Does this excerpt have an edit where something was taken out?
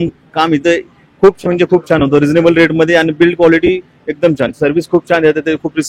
no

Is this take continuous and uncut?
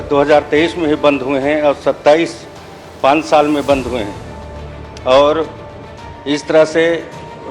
yes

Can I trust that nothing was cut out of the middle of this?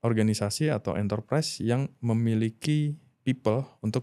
yes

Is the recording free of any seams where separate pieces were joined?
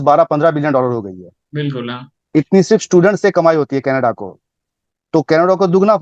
yes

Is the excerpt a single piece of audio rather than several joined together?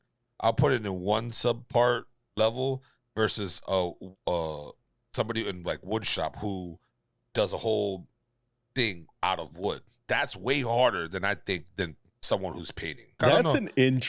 no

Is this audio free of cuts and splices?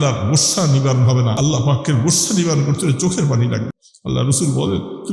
no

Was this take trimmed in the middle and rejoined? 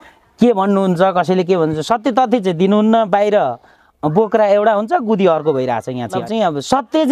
yes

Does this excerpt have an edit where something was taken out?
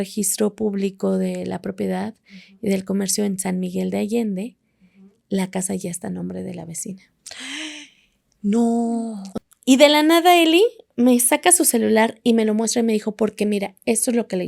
yes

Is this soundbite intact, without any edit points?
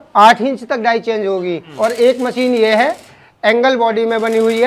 no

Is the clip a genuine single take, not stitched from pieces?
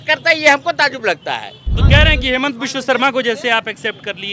no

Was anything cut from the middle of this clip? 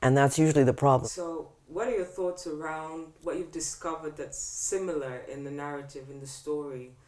yes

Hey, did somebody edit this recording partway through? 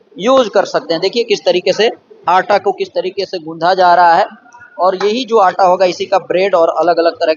no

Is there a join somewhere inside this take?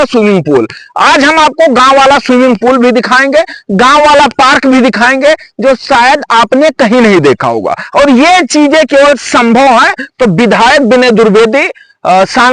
no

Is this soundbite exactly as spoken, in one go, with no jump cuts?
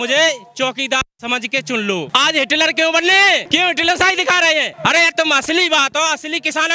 no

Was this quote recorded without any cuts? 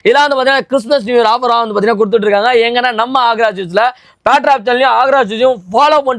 yes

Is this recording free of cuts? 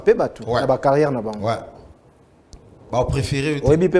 yes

